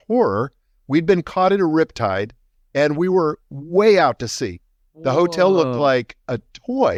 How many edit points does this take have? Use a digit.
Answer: 0